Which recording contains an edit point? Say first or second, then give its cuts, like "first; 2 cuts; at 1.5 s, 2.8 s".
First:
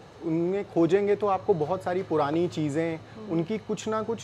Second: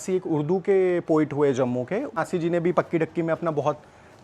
second; 1 cut; at 2.1 s